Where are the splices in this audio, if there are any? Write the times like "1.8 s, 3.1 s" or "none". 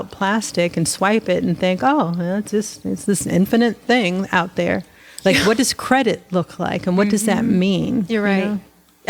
none